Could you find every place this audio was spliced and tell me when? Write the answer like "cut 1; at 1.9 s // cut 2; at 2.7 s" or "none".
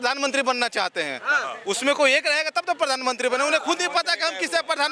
none